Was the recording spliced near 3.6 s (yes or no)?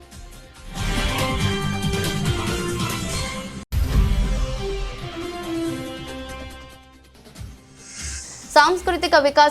yes